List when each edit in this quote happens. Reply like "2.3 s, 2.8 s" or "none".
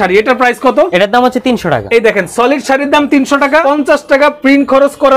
0.9 s, 1.8 s, 3.6 s